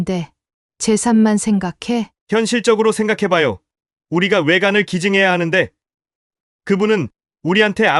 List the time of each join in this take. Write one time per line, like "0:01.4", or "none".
none